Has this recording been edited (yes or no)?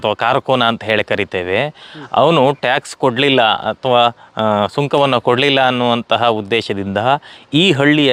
no